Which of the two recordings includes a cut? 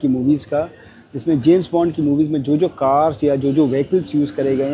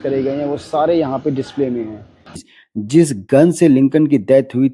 second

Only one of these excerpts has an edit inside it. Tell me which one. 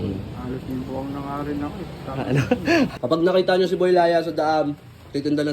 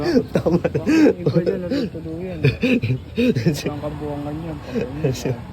first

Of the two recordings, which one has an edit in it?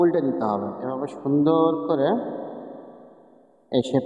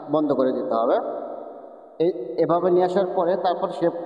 first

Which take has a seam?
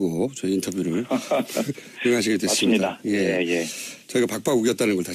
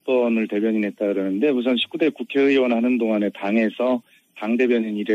second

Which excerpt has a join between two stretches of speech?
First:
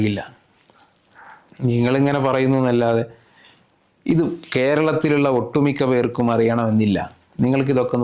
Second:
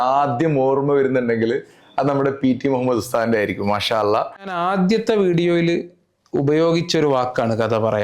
second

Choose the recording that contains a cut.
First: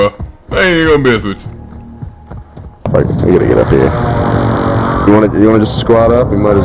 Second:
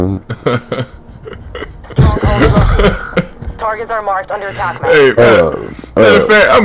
first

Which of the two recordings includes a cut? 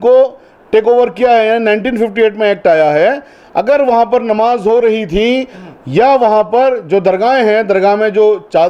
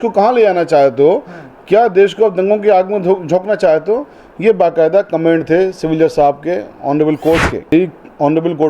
second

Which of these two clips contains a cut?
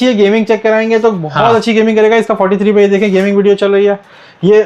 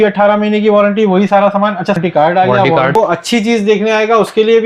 second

